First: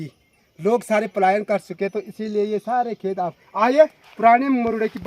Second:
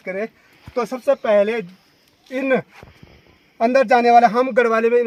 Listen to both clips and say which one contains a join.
first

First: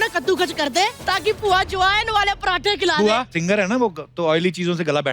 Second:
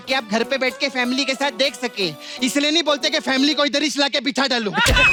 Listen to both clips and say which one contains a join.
first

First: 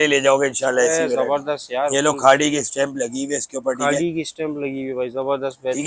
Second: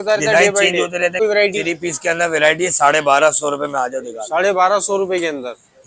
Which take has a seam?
second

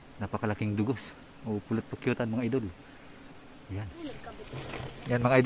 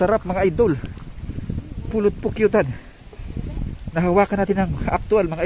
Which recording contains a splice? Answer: first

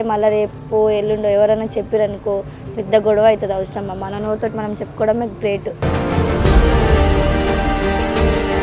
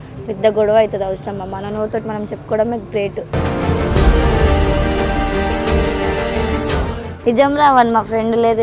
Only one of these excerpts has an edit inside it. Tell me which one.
second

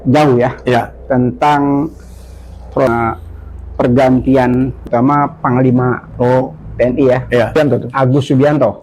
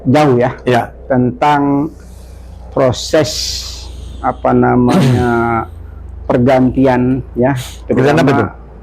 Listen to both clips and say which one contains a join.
first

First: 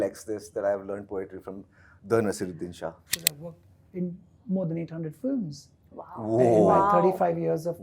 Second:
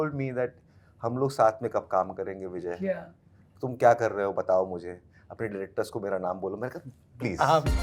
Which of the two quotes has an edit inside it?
first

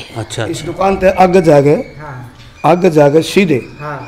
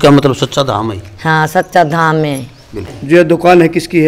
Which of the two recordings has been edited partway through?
second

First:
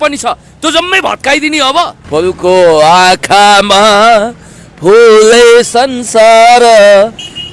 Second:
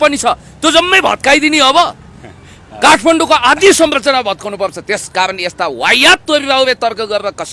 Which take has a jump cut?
first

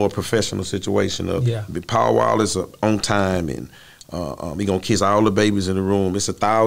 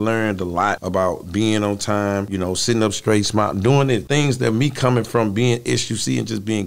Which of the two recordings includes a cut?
second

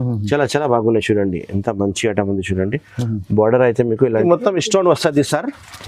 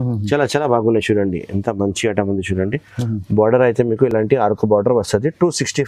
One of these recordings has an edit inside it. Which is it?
first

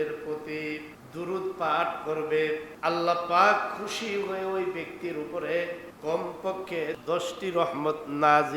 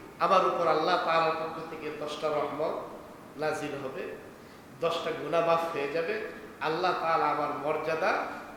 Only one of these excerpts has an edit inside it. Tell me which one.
first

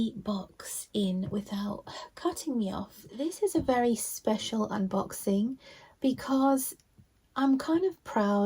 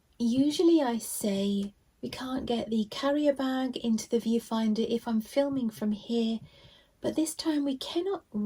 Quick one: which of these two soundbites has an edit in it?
first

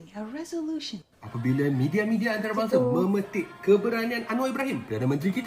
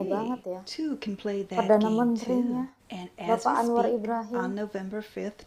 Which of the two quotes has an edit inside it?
first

